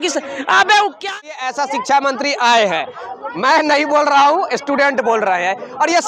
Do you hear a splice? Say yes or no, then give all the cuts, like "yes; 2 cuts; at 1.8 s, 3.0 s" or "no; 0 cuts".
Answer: yes; 1 cut; at 1.2 s